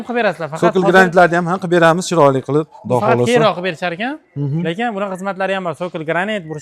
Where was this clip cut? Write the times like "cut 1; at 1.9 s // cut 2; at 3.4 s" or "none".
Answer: none

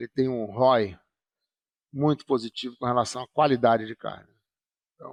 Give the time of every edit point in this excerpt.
none

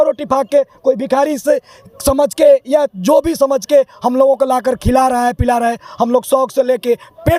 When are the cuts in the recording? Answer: none

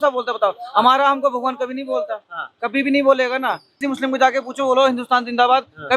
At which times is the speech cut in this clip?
cut 1; at 3.7 s

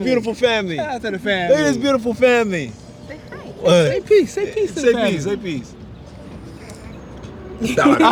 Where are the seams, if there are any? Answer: none

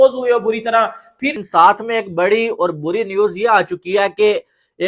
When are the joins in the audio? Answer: cut 1; at 1.3 s

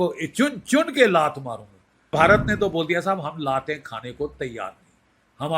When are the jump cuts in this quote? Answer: cut 1; at 2.1 s

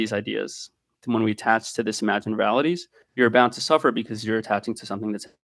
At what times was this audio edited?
cut 1; at 3.0 s

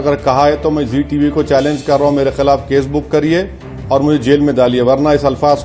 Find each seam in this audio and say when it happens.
none

